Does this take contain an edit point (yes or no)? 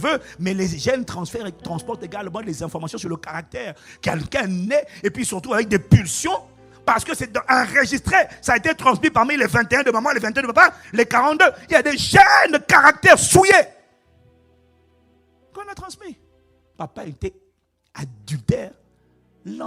no